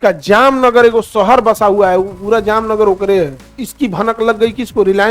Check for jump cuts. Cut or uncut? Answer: cut